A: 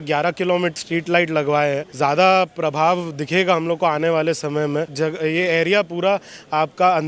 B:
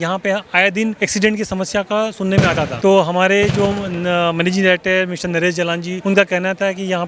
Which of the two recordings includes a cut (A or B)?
A